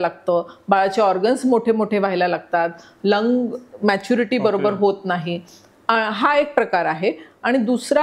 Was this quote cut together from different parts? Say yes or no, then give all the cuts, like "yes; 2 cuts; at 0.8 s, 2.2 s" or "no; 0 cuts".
no; 0 cuts